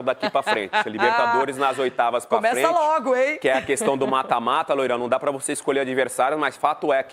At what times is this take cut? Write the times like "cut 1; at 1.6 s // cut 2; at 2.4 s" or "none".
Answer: none